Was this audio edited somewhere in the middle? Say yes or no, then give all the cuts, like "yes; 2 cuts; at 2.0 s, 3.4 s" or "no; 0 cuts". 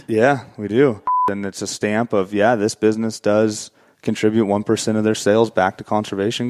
yes; 1 cut; at 1.3 s